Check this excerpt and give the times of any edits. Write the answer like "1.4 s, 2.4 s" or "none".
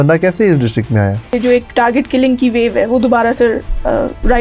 1.3 s